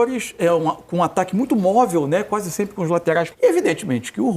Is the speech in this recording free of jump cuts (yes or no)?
no